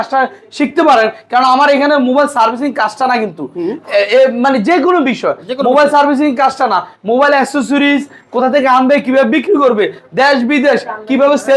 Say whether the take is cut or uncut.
uncut